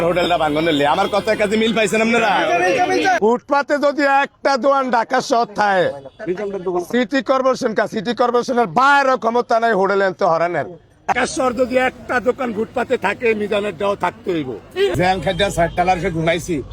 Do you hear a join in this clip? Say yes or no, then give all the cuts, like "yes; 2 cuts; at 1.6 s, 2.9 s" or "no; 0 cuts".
yes; 3 cuts; at 3.2 s, 11.1 s, 14.9 s